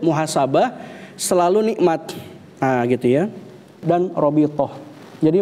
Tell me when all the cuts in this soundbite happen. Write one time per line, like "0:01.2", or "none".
0:03.8

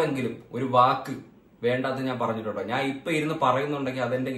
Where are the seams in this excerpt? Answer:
none

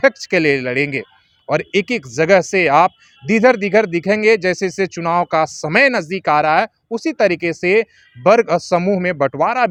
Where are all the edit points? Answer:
none

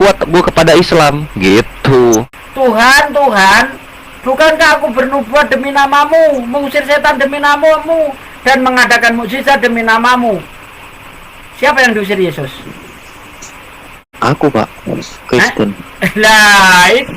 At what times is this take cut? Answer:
0:02.3
0:14.1

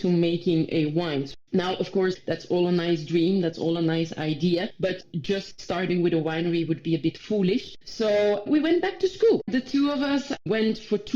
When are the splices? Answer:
0:01.3
0:02.2
0:05.1

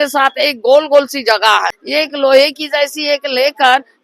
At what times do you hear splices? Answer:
0:01.8

